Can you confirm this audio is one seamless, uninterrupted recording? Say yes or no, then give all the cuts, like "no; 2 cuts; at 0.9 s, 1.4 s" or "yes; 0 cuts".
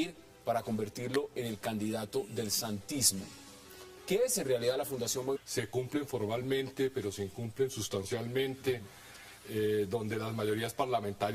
yes; 0 cuts